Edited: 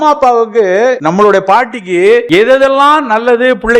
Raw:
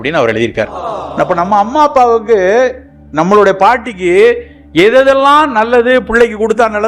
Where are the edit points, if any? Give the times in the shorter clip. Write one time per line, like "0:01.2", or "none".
0:01.0
0:02.3